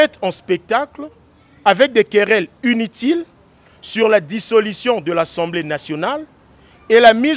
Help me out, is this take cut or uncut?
uncut